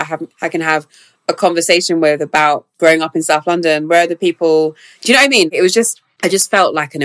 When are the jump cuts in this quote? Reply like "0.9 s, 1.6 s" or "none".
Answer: 2.7 s, 6.0 s